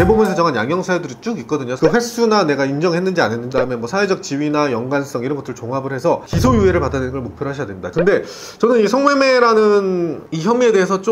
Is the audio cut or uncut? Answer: cut